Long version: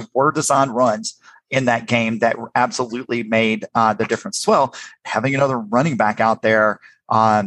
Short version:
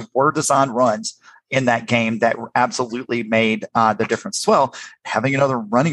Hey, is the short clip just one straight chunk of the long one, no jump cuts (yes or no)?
yes